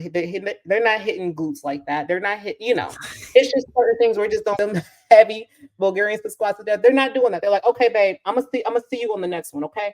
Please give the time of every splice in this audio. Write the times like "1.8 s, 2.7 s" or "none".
4.6 s